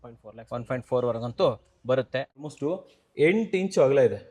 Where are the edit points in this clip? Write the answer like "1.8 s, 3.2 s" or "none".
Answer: 2.4 s